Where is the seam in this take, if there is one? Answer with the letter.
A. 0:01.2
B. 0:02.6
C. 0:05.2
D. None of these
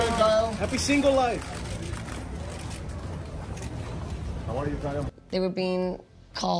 C